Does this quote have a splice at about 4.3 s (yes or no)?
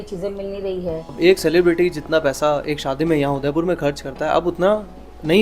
no